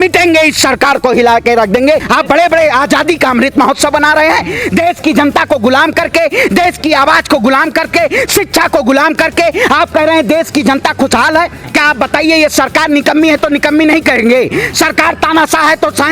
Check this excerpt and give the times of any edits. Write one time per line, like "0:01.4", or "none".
0:02.0
0:11.6